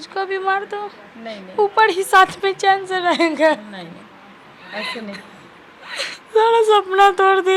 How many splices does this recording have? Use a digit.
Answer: 0